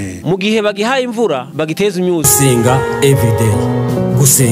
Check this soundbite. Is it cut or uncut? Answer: cut